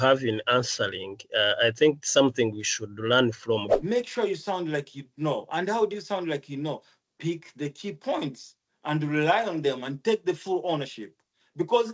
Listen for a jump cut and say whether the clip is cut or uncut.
cut